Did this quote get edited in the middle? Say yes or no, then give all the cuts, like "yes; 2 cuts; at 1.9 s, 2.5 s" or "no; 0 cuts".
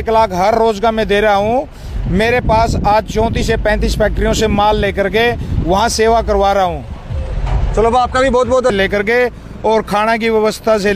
yes; 1 cut; at 8.7 s